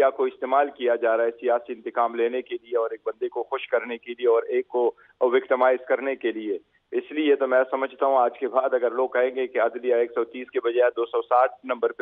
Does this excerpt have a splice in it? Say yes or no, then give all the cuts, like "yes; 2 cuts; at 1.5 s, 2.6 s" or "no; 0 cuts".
no; 0 cuts